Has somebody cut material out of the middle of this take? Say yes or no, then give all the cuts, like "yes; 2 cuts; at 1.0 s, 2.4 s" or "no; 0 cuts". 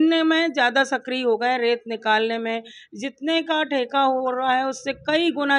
no; 0 cuts